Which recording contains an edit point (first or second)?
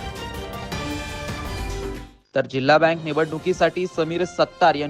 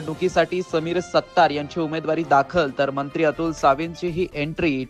first